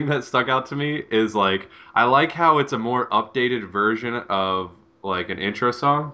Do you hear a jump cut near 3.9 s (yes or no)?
no